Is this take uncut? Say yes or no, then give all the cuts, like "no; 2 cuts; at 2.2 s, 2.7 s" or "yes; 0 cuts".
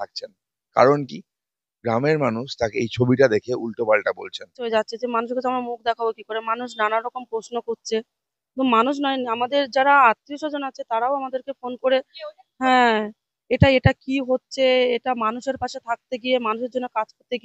no; 1 cut; at 4.6 s